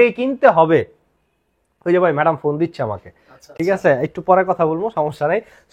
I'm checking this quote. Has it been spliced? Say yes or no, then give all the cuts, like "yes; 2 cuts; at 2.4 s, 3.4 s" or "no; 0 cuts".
no; 0 cuts